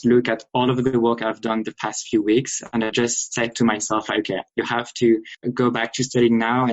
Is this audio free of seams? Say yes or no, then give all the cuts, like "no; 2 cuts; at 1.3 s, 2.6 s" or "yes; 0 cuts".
no; 1 cut; at 5.4 s